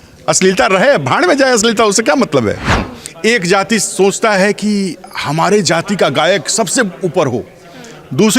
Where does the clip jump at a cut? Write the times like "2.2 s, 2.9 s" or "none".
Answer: 2.9 s